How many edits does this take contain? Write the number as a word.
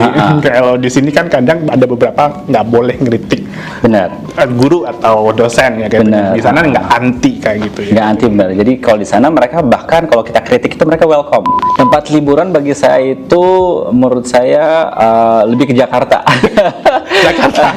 one